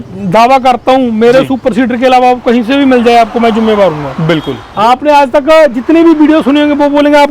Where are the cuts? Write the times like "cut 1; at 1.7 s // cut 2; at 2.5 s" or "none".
cut 1; at 4.6 s

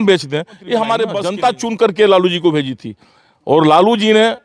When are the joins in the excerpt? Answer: cut 1; at 1.2 s

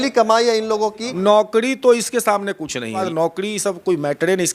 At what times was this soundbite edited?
cut 1; at 1.1 s // cut 2; at 3.1 s

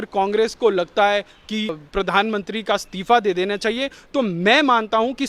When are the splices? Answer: cut 1; at 1.8 s

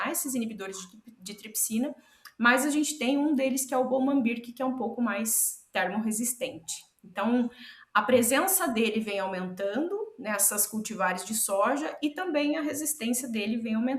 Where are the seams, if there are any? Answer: none

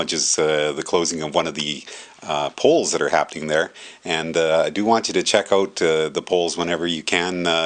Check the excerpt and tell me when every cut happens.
none

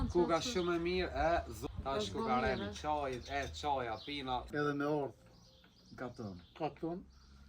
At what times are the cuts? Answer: cut 1; at 1.6 s // cut 2; at 4.5 s

